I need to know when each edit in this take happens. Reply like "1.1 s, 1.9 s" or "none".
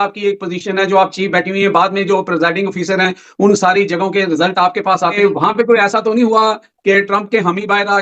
5.1 s